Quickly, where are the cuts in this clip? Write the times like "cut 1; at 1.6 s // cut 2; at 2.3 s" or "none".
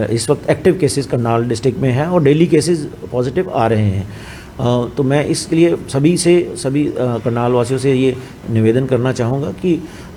none